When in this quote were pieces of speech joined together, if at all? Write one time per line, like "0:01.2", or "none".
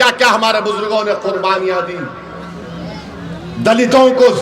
none